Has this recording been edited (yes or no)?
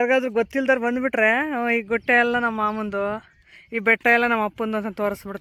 no